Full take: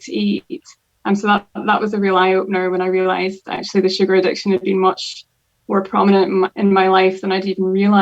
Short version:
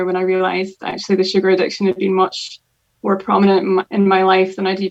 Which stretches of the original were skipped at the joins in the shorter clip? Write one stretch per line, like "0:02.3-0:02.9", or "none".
none